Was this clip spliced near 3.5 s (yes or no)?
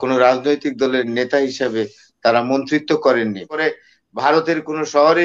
yes